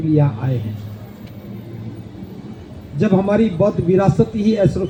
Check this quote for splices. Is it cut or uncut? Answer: uncut